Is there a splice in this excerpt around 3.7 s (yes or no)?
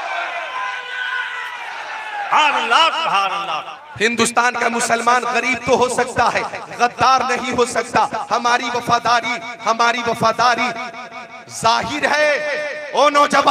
yes